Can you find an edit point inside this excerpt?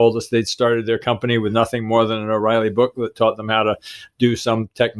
no; 0 cuts

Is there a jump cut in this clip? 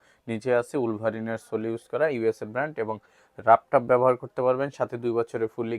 no; 0 cuts

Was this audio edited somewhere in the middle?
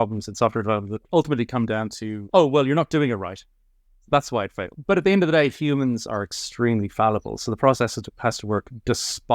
no; 0 cuts

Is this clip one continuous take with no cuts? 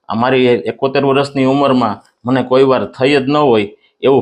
yes; 0 cuts

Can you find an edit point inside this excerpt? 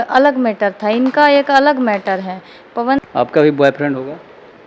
yes; 1 cut; at 3.1 s

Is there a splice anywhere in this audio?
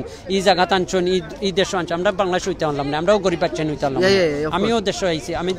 no; 0 cuts

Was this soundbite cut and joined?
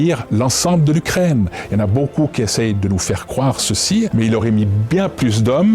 yes; 1 cut; at 4.1 s

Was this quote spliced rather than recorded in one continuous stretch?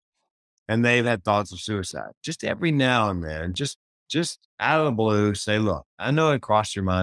no; 0 cuts

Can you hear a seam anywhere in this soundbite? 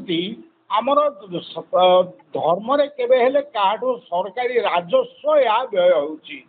no; 0 cuts

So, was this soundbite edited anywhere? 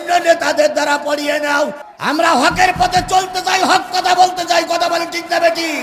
yes; 1 cut; at 1.9 s

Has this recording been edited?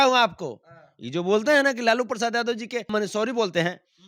yes; 1 cut; at 2.9 s

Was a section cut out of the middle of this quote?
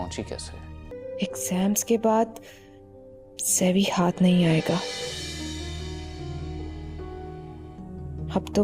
yes; 1 cut; at 0.9 s

